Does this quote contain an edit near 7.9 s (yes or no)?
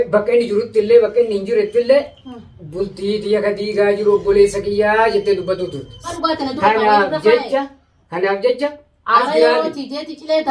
no